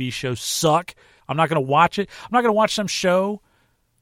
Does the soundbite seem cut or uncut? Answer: cut